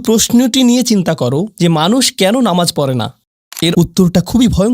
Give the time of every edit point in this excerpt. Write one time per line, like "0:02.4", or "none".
0:03.7